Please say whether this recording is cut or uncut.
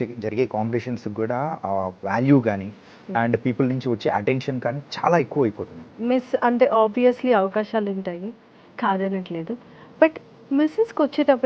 cut